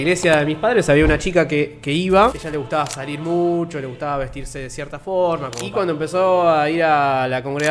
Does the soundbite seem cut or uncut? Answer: cut